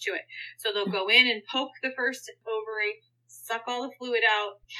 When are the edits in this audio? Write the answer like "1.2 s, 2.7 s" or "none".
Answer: 2.4 s